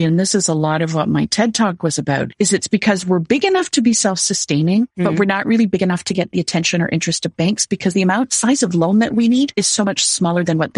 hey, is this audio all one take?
no; 2 cuts; at 2.3 s, 9.5 s

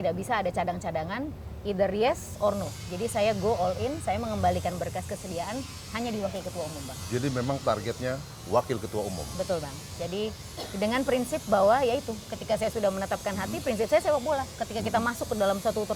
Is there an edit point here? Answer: no; 0 cuts

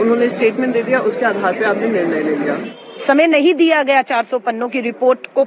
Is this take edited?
yes; 1 cut; at 2.7 s

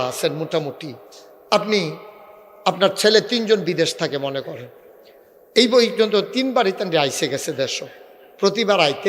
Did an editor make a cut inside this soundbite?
no; 0 cuts

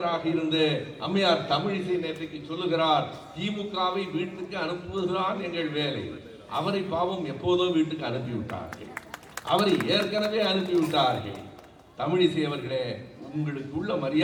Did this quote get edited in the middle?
no; 0 cuts

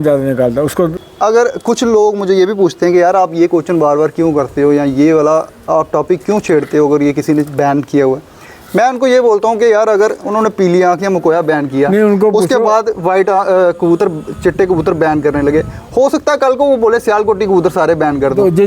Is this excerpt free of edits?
no; 1 cut; at 1.0 s

